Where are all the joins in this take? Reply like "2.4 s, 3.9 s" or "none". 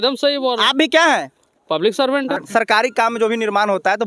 2.4 s